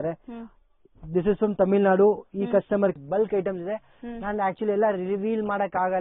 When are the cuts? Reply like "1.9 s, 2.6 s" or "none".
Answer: 3.0 s